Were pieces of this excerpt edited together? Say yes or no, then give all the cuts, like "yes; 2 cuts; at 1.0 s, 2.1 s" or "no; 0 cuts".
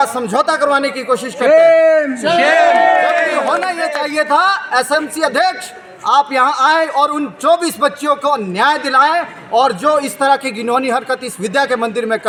no; 0 cuts